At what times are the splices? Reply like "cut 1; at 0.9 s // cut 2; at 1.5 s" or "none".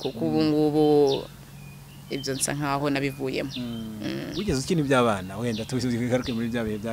none